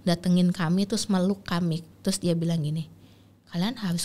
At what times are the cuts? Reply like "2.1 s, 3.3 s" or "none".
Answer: 1.9 s